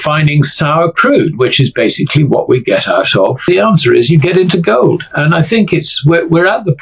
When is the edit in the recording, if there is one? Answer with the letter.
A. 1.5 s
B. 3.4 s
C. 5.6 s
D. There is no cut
B